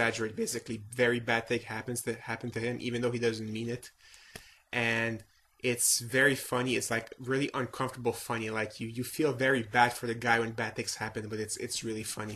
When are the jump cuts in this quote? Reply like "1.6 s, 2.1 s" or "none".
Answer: 3.8 s